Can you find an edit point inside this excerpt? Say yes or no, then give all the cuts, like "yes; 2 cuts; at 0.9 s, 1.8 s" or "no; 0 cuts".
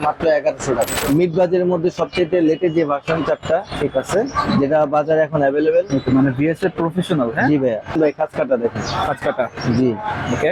yes; 2 cuts; at 1.0 s, 7.9 s